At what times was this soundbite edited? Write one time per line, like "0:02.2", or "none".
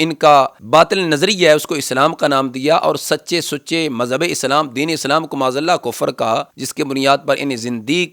none